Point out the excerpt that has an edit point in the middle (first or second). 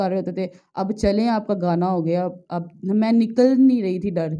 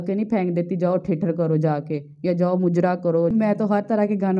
second